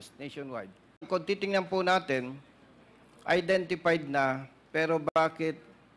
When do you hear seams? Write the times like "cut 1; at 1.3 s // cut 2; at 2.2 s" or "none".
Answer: cut 1; at 1.0 s